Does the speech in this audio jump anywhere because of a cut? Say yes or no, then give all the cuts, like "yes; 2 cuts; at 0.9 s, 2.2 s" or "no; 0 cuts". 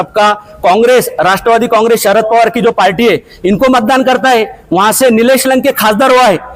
no; 0 cuts